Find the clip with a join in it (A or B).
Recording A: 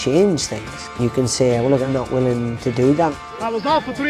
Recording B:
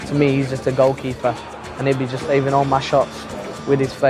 A